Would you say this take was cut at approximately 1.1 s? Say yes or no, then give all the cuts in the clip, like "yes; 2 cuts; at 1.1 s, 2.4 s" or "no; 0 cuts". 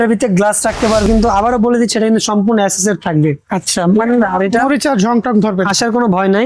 yes; 1 cut; at 1.1 s